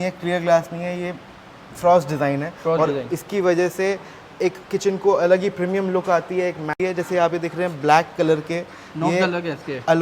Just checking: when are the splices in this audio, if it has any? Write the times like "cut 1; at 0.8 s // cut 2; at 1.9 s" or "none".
cut 1; at 6.8 s